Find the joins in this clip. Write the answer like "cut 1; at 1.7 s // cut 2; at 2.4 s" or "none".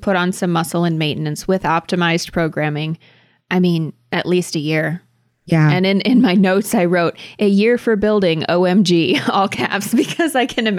none

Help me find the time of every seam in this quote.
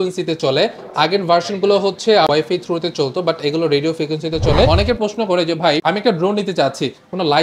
cut 1; at 2.3 s // cut 2; at 4.7 s // cut 3; at 5.8 s

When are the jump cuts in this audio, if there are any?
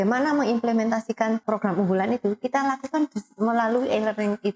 cut 1; at 1.4 s

